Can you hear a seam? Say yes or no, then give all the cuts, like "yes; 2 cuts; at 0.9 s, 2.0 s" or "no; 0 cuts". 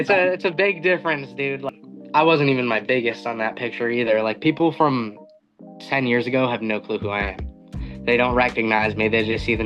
yes; 1 cut; at 1.7 s